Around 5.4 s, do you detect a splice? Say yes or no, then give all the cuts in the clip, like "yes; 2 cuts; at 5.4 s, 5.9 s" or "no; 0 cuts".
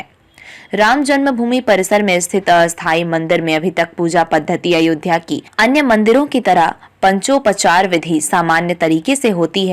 yes; 1 cut; at 5.4 s